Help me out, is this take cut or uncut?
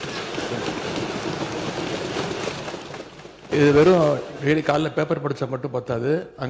cut